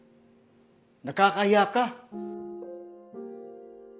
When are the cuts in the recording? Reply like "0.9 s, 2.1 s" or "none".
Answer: 2.1 s